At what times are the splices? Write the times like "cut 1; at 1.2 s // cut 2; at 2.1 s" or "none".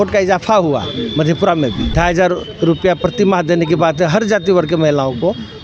cut 1; at 1.9 s